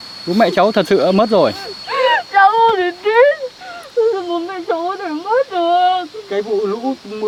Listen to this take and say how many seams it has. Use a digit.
0